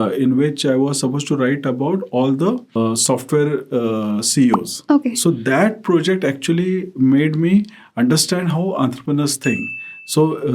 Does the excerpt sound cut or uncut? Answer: cut